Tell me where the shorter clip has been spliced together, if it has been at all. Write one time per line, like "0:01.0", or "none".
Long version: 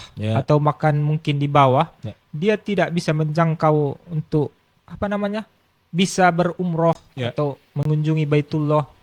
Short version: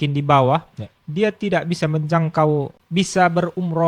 0:02.8